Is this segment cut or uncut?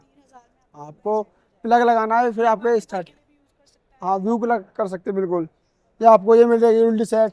uncut